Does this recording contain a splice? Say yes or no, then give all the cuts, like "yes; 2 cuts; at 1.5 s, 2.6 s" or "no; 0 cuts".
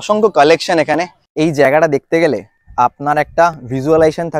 yes; 1 cut; at 1.2 s